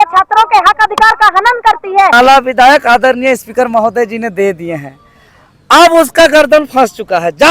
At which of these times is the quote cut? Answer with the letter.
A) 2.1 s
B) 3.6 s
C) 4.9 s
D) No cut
A